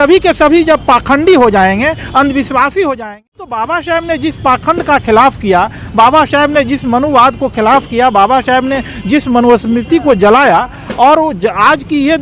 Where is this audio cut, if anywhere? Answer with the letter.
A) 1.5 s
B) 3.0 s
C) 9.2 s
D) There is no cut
B